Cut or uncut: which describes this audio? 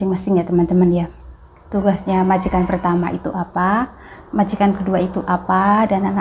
uncut